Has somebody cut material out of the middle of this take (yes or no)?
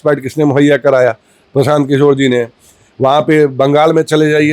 no